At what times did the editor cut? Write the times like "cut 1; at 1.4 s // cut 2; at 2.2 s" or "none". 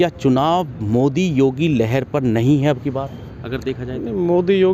none